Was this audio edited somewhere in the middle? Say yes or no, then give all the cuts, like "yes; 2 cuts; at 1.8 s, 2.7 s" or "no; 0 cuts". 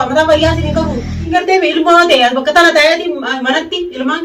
yes; 1 cut; at 1.3 s